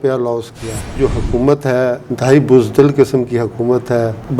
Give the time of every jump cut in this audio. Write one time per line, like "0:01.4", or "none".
0:00.9